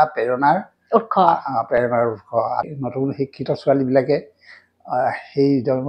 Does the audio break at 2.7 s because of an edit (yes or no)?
yes